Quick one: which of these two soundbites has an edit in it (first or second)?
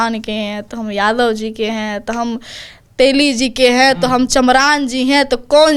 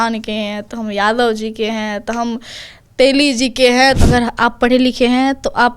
second